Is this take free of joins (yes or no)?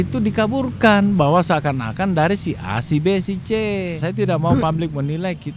no